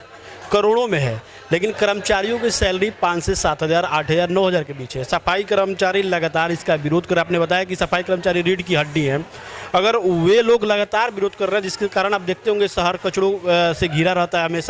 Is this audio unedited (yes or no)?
yes